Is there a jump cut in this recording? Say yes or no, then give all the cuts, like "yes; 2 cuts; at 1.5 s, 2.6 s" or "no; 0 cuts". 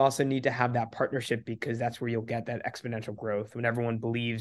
no; 0 cuts